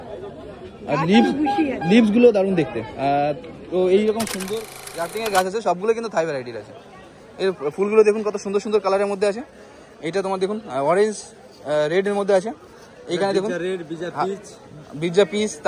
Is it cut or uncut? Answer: cut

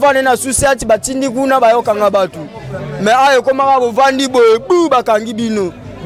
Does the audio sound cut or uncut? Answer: uncut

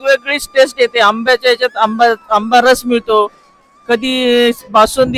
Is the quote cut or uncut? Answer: uncut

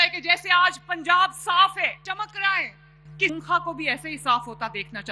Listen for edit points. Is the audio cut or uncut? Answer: cut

